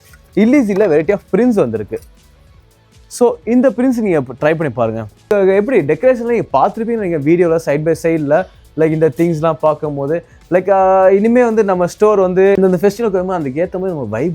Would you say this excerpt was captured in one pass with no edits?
no; 1 cut; at 5.3 s

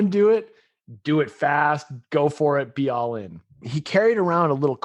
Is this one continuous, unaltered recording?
no; 1 cut; at 3.7 s

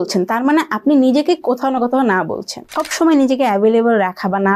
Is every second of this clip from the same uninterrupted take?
no; 1 cut; at 2.8 s

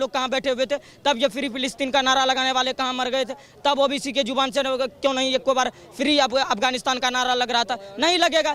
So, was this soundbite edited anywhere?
no; 0 cuts

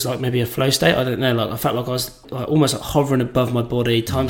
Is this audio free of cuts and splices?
no; 1 cut; at 2.3 s

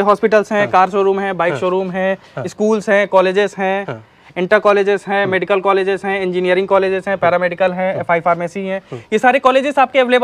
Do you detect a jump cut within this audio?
no; 0 cuts

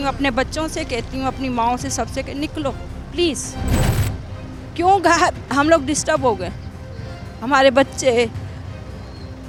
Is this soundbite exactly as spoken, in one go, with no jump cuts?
yes; 0 cuts

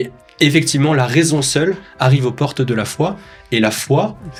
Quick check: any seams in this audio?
no; 0 cuts

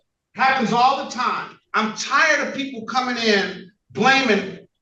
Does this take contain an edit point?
yes; 1 cut; at 1.6 s

